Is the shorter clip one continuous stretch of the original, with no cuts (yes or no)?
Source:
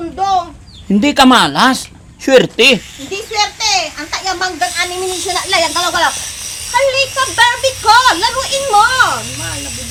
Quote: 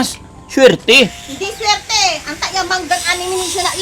yes